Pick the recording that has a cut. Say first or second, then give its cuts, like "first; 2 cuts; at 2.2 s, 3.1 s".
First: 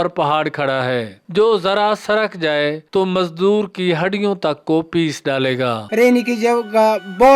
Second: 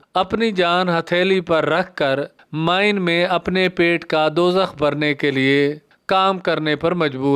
first; 1 cut; at 5.9 s